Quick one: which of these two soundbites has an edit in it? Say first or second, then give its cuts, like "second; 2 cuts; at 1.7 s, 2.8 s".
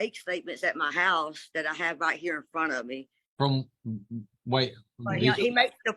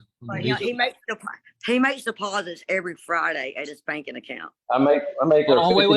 first; 1 cut; at 3.2 s